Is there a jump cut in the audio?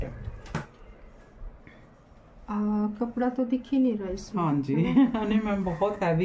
no; 0 cuts

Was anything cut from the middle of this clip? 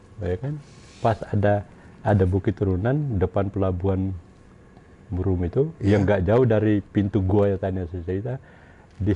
no; 0 cuts

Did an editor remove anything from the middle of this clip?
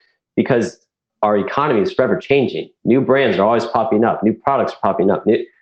yes; 1 cut; at 1.0 s

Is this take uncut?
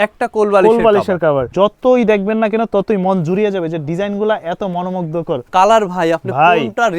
no; 2 cuts; at 1.5 s, 5.4 s

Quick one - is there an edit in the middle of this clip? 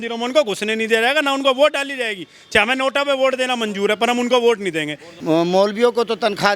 yes; 1 cut; at 5.1 s

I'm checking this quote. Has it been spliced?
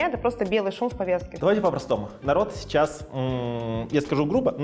yes; 1 cut; at 1.3 s

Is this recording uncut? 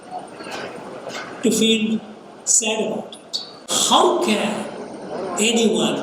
no; 1 cut; at 3.7 s

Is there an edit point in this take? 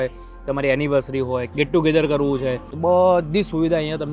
yes; 2 cuts; at 1.5 s, 2.7 s

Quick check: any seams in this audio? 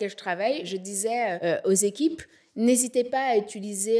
yes; 1 cut; at 1.0 s

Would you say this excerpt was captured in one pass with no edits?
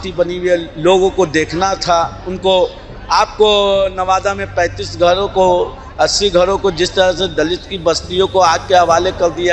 yes; 0 cuts

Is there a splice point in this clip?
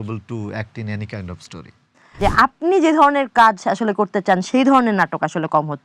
yes; 1 cut; at 2.2 s

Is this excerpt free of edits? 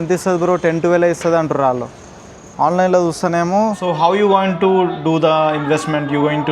no; 1 cut; at 3.8 s

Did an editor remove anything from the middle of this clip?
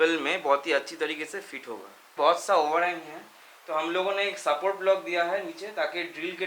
yes; 1 cut; at 2.1 s

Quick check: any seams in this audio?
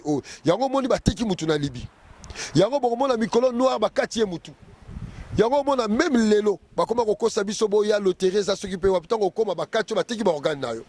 no; 0 cuts

